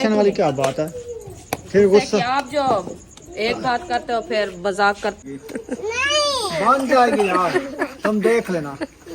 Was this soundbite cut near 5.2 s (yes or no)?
yes